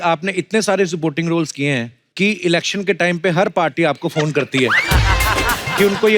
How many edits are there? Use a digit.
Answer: 1